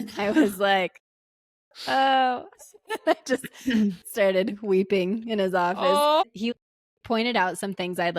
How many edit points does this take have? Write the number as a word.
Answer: one